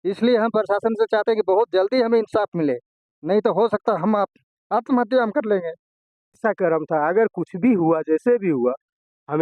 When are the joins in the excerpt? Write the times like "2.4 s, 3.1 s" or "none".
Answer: 6.4 s

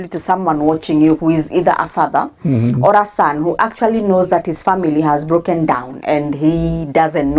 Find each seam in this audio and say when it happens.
none

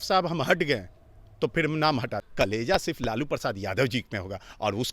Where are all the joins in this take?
2.3 s

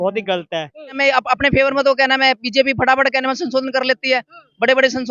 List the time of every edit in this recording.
0.9 s

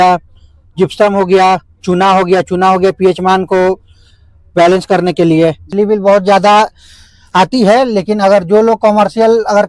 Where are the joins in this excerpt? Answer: 5.7 s

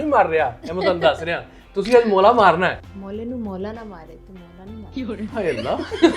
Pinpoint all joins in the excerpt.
2.9 s

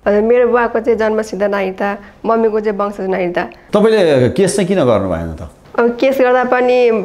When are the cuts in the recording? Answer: 3.6 s

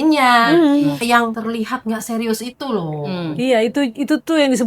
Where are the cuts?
1.2 s

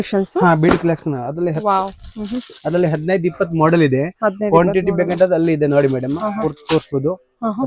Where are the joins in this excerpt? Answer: none

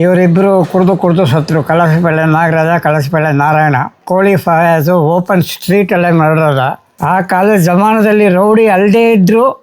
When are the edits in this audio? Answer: 6.9 s

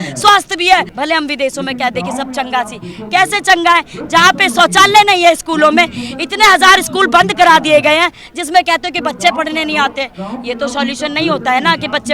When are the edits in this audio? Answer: 0.9 s

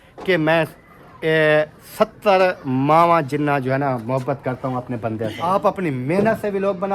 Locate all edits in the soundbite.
5.4 s

